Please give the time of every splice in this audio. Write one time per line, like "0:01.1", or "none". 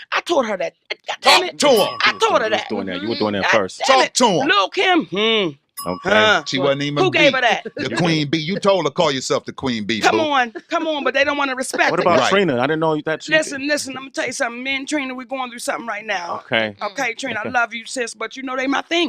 0:03.7